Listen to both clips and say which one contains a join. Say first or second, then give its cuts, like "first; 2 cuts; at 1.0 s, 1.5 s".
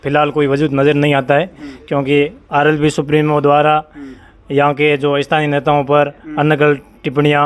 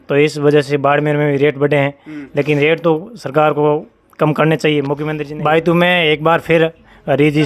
second; 1 cut; at 5.1 s